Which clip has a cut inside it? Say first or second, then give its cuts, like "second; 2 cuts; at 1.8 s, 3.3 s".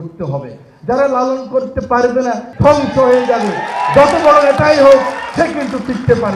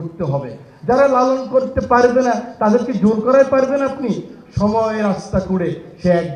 first; 1 cut; at 2.5 s